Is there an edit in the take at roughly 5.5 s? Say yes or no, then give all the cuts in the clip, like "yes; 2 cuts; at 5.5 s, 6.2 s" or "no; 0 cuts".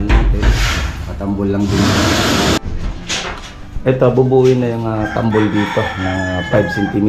no; 1 cut; at 2.6 s